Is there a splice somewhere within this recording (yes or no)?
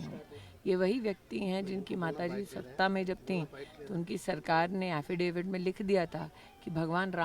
yes